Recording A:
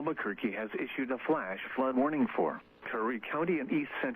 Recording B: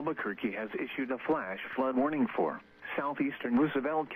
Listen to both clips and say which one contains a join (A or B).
A